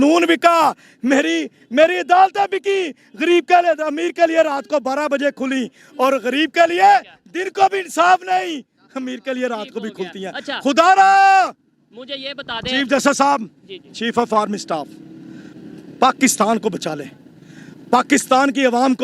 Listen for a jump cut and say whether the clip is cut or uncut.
uncut